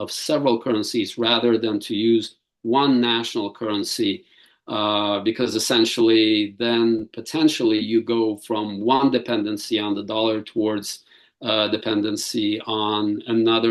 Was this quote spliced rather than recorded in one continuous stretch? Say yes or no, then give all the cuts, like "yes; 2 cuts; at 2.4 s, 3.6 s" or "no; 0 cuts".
no; 0 cuts